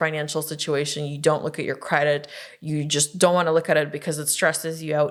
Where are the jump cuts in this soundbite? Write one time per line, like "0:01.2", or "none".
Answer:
none